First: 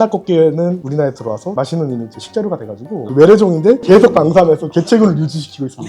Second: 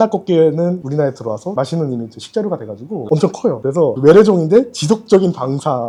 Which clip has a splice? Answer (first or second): first